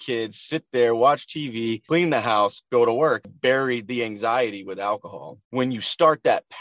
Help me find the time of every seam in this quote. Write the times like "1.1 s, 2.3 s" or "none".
1.8 s, 3.3 s, 5.4 s